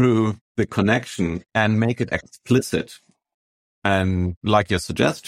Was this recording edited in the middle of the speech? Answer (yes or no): yes